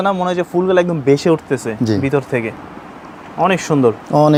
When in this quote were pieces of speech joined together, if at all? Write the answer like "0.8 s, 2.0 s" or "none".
none

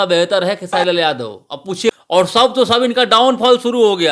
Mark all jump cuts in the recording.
1.9 s

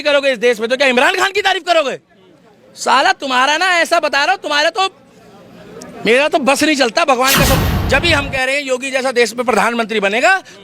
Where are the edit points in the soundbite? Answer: 7.7 s

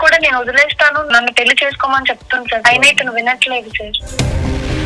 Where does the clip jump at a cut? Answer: 1.1 s, 2.6 s

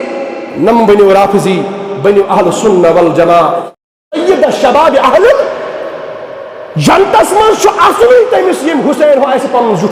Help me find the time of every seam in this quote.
4.0 s

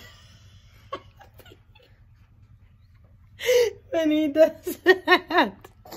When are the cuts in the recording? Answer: none

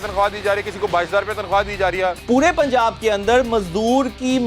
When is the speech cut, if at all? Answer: 2.2 s

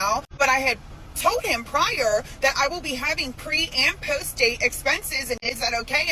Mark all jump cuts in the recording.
none

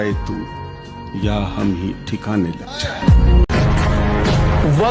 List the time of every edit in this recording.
3.5 s

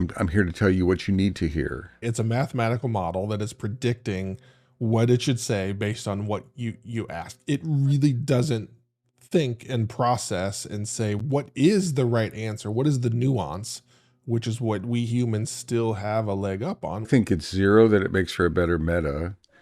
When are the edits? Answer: 2.1 s, 17.1 s

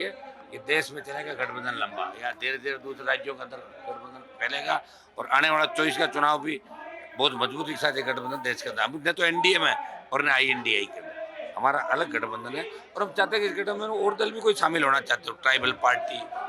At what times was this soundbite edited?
none

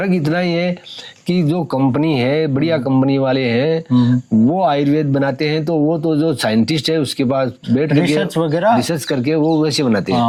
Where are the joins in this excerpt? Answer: none

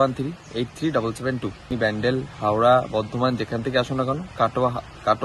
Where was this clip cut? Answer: 1.7 s

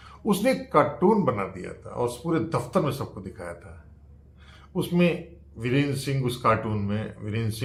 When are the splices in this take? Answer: none

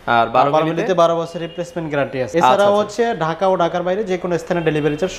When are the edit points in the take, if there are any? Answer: 2.3 s

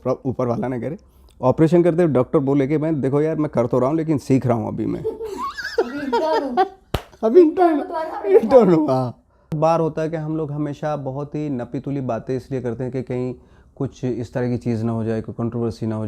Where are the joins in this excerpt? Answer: 9.6 s

